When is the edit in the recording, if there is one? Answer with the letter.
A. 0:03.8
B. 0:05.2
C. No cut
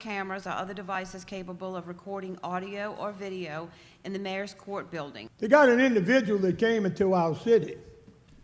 B